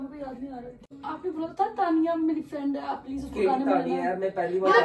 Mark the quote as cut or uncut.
cut